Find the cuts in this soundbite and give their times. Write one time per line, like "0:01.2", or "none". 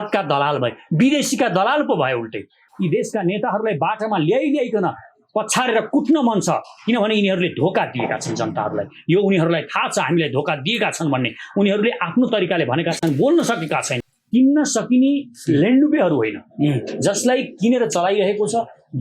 0:02.7
0:14.0